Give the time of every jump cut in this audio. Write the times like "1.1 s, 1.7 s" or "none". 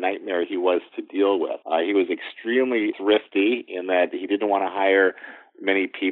1.6 s, 2.9 s

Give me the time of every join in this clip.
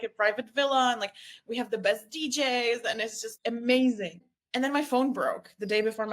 3.3 s, 4.1 s

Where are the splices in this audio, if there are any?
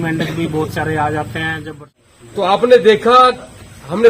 1.9 s

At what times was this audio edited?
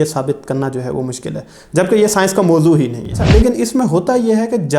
3.2 s

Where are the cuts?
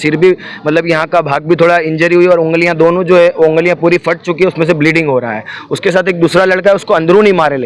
none

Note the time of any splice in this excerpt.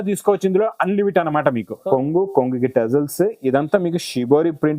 1.8 s

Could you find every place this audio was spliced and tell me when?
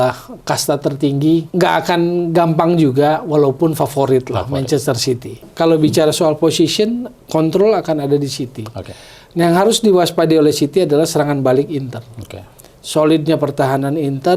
1.5 s, 5.5 s

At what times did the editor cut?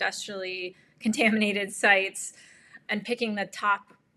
2.7 s

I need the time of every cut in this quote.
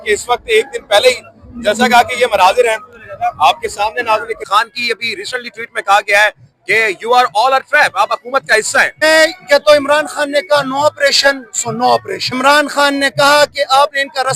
4.4 s, 9.0 s, 12.2 s

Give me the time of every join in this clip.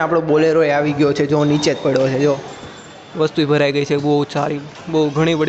none

